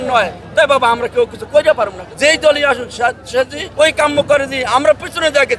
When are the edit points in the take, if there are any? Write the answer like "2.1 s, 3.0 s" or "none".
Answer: 2.0 s, 3.6 s